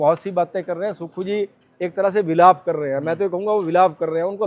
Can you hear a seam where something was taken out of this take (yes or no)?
no